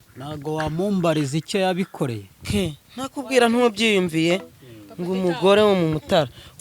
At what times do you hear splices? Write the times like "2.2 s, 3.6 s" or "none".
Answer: 2.3 s